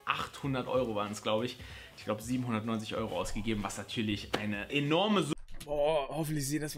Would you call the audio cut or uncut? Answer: uncut